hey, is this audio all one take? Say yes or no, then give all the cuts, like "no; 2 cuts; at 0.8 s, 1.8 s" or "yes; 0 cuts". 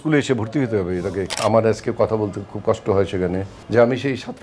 no; 2 cuts; at 1.4 s, 3.5 s